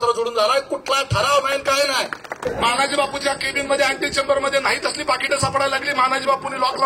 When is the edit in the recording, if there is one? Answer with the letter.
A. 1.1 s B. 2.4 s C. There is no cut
B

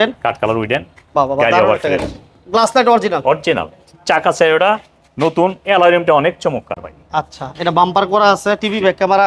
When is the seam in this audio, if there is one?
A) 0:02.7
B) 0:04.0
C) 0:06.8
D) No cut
D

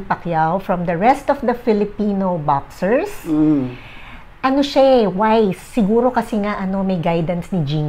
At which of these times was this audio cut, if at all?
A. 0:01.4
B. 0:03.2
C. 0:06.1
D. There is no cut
D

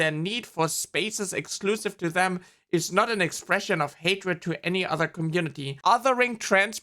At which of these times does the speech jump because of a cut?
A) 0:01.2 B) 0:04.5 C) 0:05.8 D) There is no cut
C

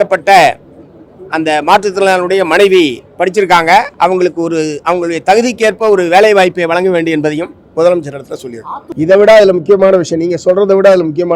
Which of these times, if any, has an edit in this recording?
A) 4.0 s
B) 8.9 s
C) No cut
B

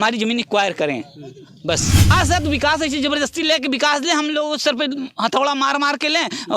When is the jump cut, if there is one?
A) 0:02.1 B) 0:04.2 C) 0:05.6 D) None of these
A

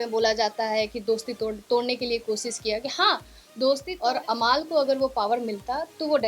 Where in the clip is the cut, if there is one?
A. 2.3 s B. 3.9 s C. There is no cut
B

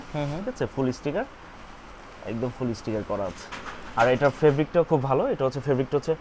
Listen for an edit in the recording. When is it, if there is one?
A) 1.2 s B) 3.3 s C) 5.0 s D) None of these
D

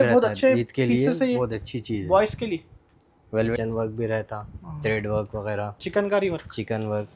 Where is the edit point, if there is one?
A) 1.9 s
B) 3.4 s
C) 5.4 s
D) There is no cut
B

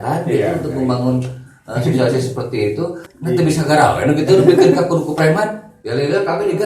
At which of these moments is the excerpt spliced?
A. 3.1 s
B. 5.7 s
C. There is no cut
A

